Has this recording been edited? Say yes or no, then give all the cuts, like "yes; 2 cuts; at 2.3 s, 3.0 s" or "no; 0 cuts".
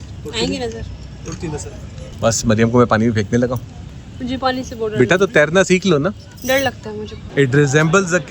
yes; 3 cuts; at 2.1 s, 3.7 s, 7.1 s